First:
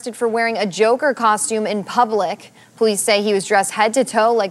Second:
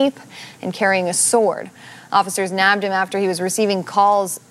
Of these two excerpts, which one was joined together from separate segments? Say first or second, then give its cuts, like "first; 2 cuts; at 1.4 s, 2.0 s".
second; 1 cut; at 2.3 s